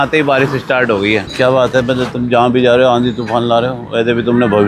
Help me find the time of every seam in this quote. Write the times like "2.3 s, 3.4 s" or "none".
1.3 s